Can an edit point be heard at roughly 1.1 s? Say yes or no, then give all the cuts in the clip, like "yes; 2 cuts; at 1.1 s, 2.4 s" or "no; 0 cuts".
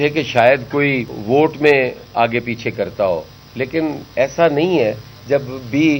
yes; 1 cut; at 1.1 s